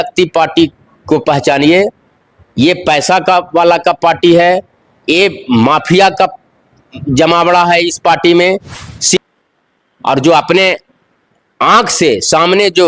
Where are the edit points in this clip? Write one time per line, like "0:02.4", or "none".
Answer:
0:09.2